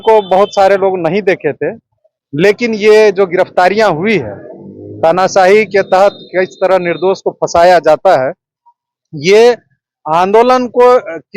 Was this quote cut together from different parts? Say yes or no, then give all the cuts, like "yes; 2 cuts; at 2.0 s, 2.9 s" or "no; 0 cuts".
no; 0 cuts